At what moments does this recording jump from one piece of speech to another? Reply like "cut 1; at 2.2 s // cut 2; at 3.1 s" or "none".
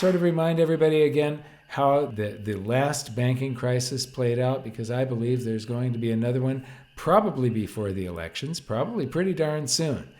cut 1; at 2.1 s

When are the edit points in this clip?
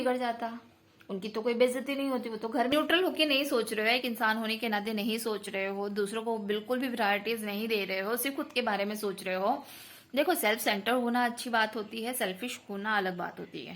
cut 1; at 2.7 s

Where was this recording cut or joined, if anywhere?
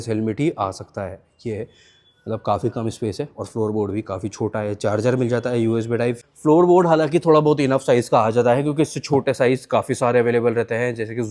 cut 1; at 6.2 s

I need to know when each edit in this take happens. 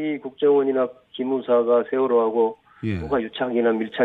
none

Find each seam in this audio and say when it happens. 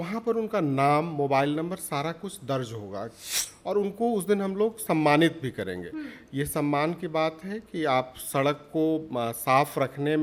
none

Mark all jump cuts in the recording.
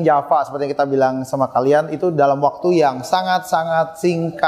none

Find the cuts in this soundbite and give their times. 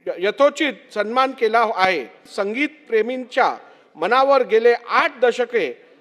cut 1; at 2.2 s

